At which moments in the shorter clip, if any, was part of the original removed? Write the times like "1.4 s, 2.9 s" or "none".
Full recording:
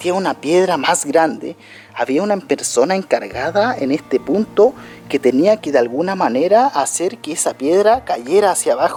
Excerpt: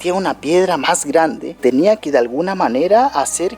1.6 s

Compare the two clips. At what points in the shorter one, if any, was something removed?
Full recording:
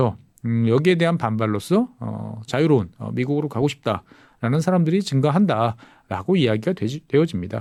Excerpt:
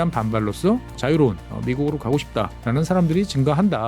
0.9 s, 2.6 s

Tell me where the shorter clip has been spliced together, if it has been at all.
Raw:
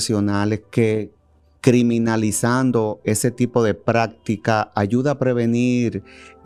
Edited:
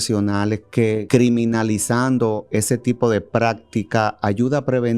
1.0 s

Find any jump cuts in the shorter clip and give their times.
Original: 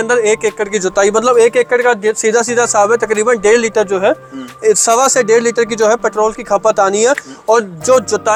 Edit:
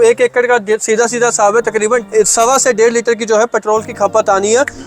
2.0 s

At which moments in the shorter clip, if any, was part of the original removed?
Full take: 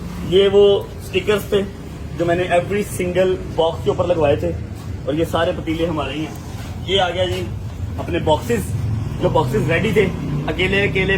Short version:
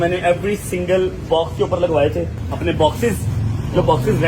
2.4 s

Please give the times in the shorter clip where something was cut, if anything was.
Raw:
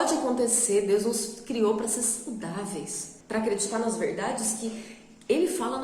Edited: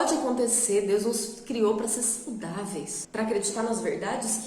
3.0 s

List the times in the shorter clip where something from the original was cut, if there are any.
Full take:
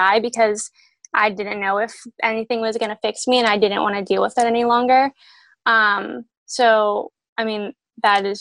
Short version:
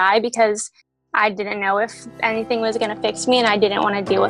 none

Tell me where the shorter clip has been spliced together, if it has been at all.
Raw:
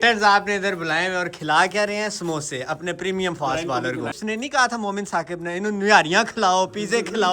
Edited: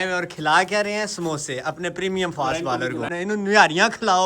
3.1 s

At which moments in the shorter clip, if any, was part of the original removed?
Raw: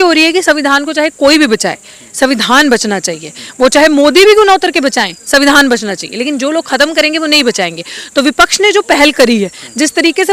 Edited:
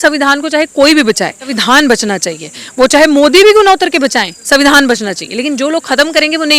1.6 s

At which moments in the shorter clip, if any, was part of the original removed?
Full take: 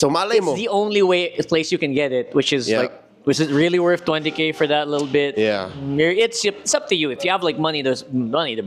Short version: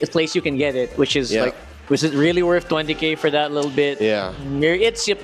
none

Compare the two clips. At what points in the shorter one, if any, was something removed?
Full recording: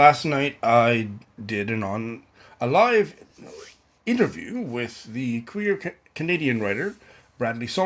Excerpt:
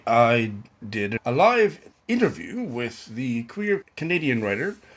1.2 s, 1.9 s, 3.9 s

